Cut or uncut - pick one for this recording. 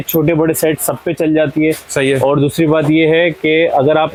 uncut